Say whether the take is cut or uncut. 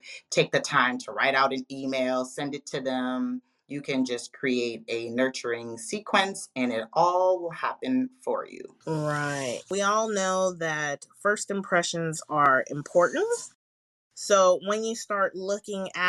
cut